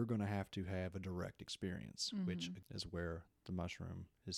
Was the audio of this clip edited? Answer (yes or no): yes